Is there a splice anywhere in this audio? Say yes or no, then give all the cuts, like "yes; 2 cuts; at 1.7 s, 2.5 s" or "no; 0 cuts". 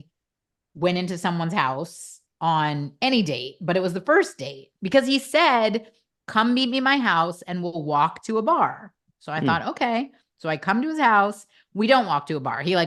no; 0 cuts